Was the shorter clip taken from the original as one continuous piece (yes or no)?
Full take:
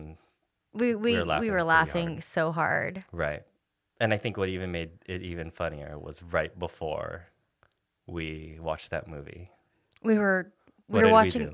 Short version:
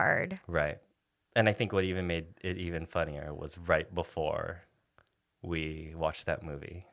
yes